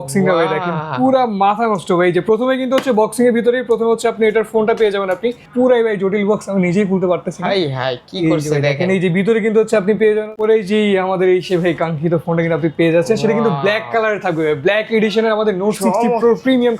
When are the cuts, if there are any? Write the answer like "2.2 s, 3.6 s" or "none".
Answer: 5.5 s, 10.3 s